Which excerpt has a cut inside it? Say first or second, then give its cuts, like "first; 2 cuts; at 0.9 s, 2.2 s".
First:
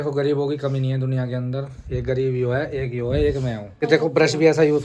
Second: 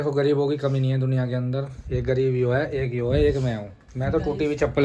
first; 1 cut; at 3.8 s